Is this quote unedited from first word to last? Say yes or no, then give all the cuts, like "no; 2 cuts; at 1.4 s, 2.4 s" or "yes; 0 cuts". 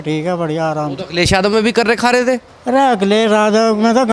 yes; 0 cuts